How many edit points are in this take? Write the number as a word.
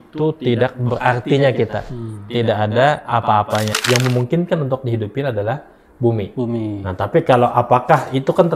one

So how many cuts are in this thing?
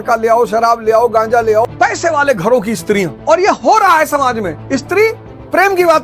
three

